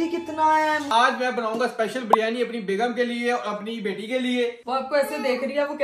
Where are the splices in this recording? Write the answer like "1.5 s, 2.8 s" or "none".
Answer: 0.9 s, 4.7 s